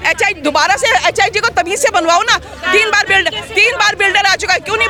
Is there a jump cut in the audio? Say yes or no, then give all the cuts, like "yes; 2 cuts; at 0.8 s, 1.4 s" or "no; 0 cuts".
no; 0 cuts